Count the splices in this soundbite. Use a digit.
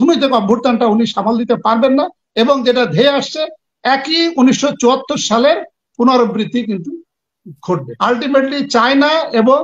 1